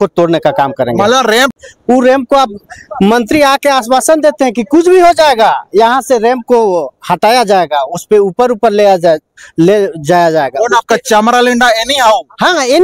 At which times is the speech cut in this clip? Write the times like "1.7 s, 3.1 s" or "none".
1.5 s